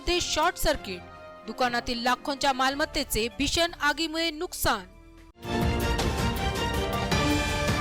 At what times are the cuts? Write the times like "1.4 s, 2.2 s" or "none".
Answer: none